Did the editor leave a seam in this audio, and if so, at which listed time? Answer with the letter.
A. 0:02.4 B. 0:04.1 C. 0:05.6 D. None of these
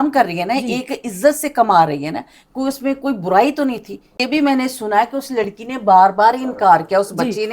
B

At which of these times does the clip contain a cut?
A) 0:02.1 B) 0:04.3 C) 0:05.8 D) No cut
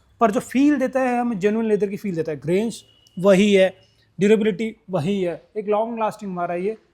D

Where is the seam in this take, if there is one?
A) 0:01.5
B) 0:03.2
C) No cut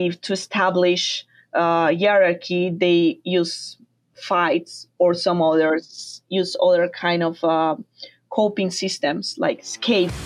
C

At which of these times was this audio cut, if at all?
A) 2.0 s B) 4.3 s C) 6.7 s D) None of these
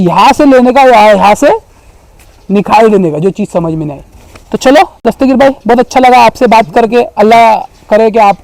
D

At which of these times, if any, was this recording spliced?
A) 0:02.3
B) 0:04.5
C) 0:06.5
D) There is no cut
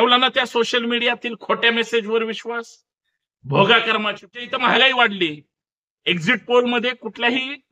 B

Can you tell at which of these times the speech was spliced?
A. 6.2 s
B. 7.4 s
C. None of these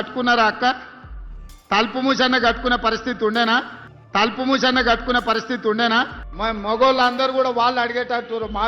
A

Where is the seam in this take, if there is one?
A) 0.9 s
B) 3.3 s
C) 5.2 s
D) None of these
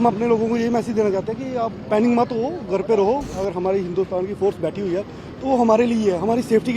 B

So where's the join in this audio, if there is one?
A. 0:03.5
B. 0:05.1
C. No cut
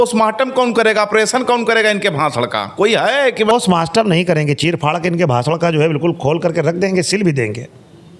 A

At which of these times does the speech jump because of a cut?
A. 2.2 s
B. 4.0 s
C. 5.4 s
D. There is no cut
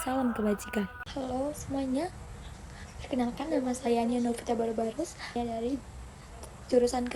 C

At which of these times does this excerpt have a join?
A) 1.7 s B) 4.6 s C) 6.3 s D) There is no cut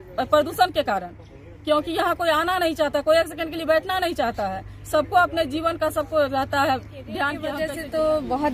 D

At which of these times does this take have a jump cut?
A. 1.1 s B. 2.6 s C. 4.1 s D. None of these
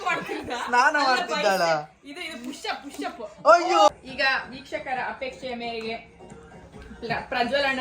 C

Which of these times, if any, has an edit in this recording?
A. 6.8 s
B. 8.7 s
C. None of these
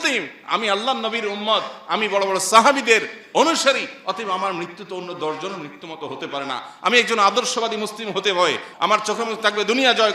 B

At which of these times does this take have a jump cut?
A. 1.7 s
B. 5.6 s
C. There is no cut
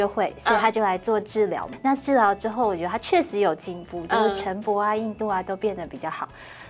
A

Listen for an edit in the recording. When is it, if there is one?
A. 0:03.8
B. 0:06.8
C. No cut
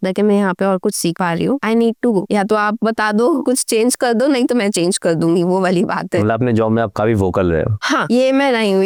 C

